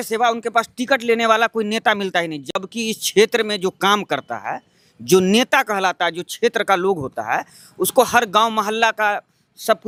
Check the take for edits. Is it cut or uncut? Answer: uncut